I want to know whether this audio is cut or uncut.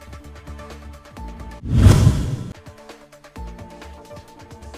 cut